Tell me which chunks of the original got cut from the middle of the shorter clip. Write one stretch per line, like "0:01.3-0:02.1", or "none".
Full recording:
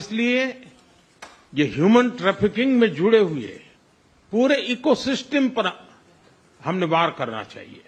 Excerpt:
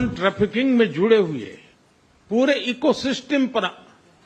none